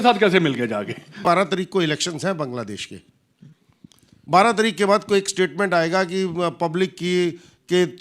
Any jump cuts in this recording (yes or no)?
yes